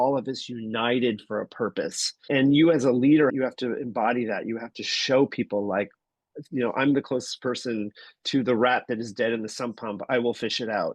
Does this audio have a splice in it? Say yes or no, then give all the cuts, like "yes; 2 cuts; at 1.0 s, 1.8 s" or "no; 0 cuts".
yes; 2 cuts; at 2.3 s, 3.3 s